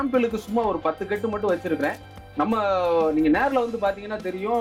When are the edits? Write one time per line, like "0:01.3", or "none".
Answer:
none